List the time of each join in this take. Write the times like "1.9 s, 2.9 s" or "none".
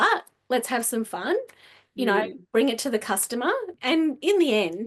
3.7 s